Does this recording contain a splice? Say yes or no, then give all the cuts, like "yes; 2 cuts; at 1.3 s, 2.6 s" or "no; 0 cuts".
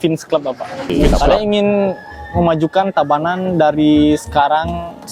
yes; 1 cut; at 1.1 s